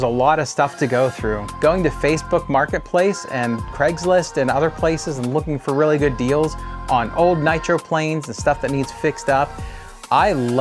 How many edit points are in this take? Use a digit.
1